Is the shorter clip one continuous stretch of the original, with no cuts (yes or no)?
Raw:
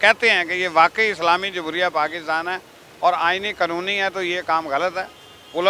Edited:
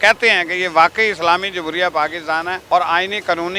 no